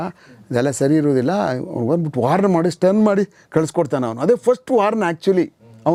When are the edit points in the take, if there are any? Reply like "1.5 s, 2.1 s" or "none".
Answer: none